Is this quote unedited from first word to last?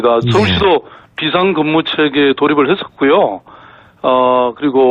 no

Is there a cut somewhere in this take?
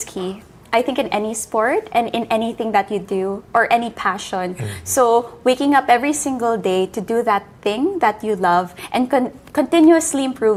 no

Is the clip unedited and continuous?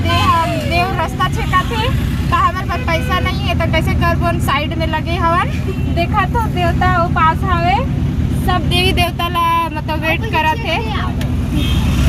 yes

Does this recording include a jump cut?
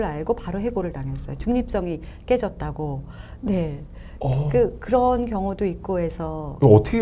no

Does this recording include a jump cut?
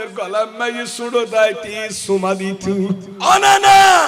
yes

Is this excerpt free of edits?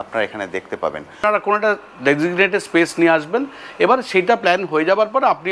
no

